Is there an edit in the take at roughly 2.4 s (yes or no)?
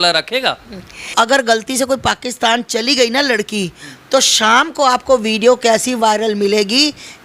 no